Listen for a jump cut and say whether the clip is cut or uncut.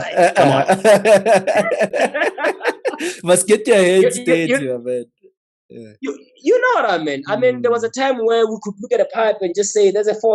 uncut